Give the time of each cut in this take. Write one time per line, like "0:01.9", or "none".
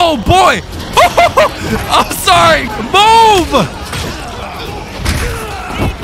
0:02.7